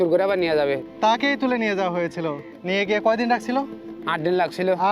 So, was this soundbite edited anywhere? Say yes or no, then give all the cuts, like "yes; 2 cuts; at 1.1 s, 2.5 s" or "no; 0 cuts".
yes; 2 cuts; at 0.8 s, 2.5 s